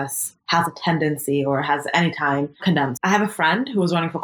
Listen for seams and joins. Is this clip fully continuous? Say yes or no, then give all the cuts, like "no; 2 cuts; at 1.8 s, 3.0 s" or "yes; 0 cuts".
no; 1 cut; at 2.7 s